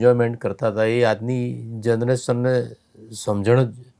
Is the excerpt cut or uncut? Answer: uncut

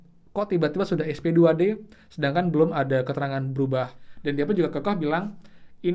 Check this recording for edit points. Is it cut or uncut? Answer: cut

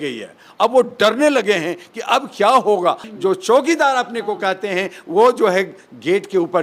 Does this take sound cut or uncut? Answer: cut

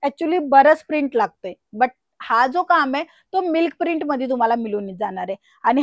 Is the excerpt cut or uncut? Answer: uncut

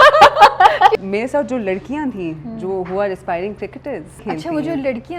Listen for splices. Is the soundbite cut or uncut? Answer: cut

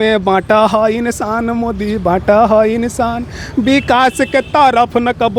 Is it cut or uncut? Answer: uncut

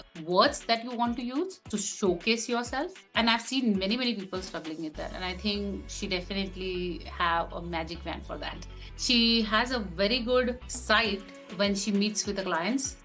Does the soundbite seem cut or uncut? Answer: uncut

